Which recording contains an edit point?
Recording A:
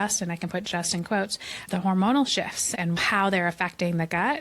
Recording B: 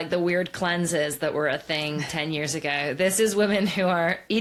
A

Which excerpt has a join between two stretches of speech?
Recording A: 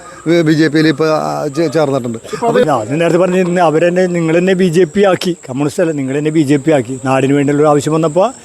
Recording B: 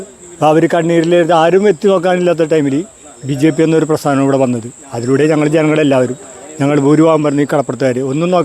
A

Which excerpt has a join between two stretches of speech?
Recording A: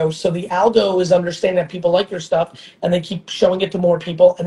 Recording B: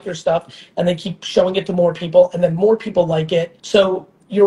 B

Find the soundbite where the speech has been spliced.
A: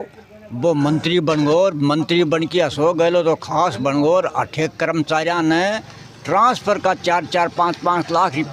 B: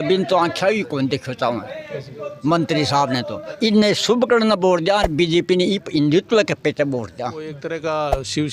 B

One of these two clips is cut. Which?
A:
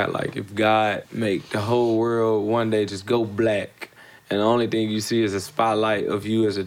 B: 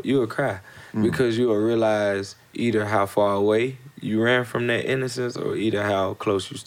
A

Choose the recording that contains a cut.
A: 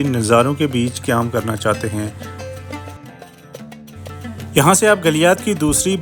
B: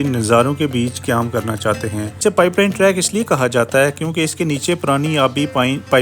B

